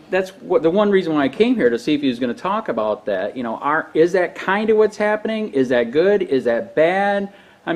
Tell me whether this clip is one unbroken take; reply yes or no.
yes